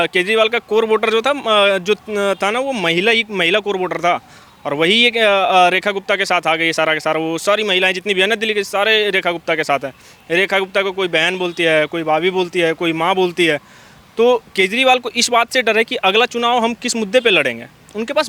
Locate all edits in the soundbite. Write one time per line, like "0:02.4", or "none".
none